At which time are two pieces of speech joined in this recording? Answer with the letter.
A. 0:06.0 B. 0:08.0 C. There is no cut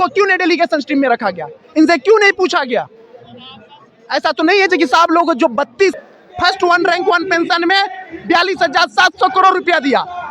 A